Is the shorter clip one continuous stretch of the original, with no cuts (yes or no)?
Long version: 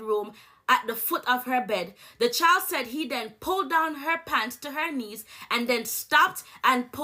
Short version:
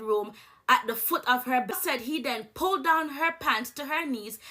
no